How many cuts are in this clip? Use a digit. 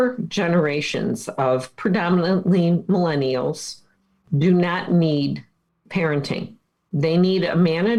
0